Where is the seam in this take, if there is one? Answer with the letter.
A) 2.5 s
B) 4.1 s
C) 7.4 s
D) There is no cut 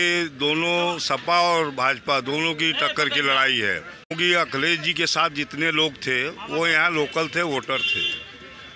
B